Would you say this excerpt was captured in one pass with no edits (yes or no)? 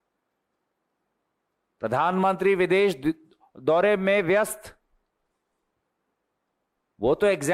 yes